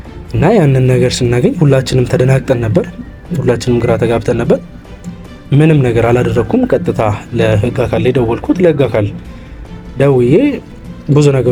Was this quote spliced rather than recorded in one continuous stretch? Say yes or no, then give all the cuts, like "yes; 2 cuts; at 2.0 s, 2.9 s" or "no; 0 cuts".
no; 0 cuts